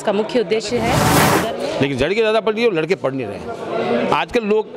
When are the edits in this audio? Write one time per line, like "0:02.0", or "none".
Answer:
0:01.2